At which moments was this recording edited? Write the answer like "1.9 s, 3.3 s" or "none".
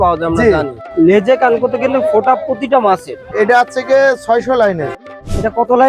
0.9 s, 3.3 s, 5.1 s